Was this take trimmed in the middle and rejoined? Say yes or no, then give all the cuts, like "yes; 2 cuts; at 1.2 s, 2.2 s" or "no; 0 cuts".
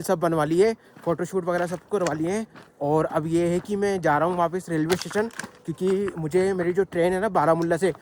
no; 0 cuts